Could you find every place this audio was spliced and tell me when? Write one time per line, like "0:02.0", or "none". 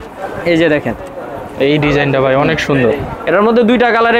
none